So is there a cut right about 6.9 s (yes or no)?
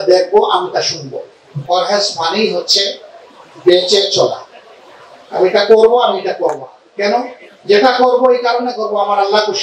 no